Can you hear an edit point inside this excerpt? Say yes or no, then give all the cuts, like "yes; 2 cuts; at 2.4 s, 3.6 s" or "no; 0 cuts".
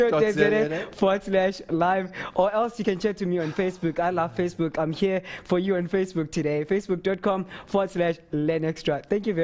yes; 1 cut; at 3.1 s